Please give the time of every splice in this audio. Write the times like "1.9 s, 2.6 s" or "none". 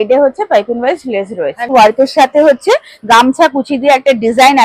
1.7 s